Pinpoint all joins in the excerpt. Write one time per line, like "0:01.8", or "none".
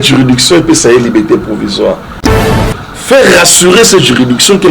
0:02.3